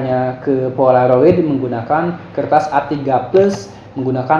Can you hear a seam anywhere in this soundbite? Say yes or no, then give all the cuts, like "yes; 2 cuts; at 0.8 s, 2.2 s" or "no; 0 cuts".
no; 0 cuts